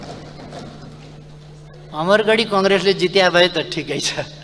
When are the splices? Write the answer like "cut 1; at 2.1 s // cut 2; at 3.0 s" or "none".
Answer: none